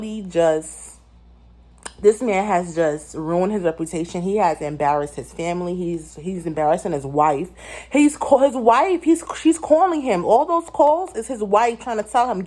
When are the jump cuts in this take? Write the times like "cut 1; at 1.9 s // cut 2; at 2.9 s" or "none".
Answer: none

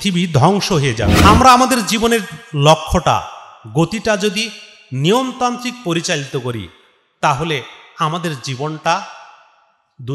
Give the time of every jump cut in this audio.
cut 1; at 1.1 s

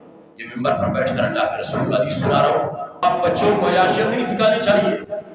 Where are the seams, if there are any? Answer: cut 1; at 3.0 s

